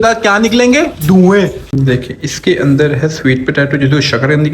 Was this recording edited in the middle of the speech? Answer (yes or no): yes